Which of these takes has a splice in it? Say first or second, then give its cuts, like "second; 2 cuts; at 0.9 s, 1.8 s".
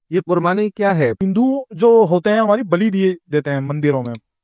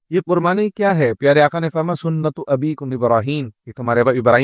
first; 1 cut; at 1.2 s